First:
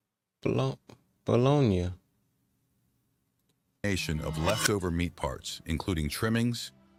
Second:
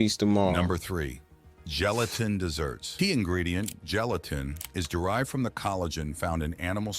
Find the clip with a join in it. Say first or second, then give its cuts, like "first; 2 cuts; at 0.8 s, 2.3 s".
second; 1 cut; at 2.9 s